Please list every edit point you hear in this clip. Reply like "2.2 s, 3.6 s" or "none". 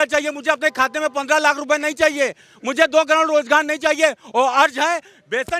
none